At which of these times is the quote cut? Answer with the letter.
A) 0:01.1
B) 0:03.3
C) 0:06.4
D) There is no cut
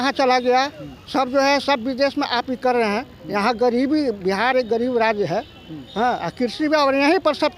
D